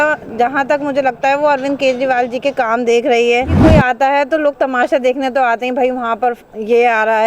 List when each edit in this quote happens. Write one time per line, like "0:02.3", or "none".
0:03.5